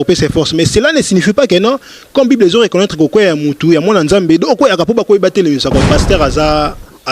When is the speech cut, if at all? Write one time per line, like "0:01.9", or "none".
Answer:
0:05.8

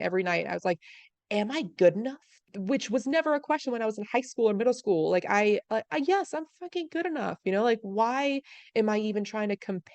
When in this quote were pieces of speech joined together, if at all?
0:02.5

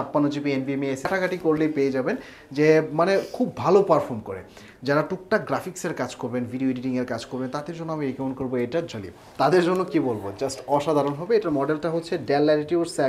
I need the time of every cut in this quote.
0:01.1
0:08.9

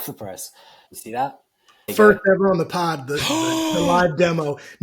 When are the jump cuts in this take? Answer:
0:00.9
0:01.9

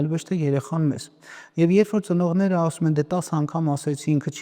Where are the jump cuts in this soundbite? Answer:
none

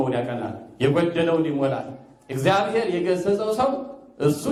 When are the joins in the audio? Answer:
none

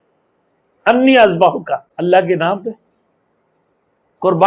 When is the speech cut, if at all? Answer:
0:01.9

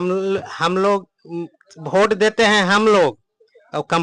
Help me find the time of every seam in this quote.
none

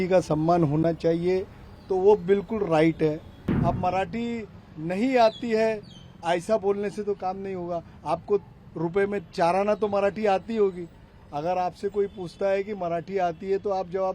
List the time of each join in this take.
0:03.3

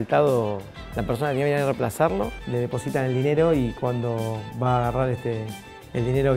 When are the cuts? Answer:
0:02.4

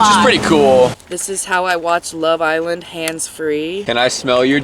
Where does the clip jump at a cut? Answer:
0:01.0
0:03.8

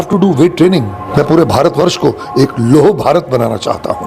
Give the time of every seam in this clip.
0:01.0

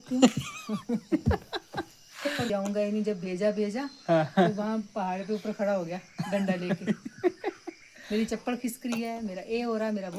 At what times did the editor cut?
0:02.5

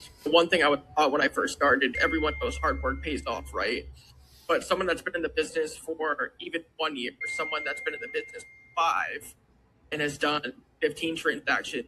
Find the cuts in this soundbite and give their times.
0:02.0
0:07.2
0:09.9

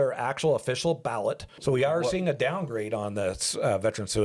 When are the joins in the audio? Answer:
0:01.5

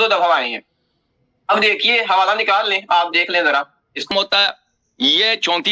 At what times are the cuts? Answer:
0:04.1

